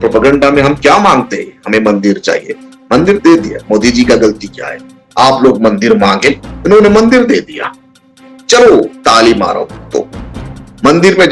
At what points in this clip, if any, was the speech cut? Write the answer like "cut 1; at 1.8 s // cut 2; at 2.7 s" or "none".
none